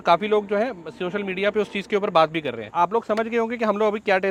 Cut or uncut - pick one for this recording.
uncut